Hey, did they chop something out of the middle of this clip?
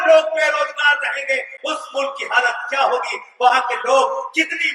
no; 0 cuts

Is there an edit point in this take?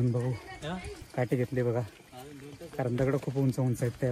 yes; 1 cut; at 1.0 s

